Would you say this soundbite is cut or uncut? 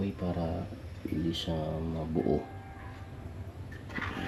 uncut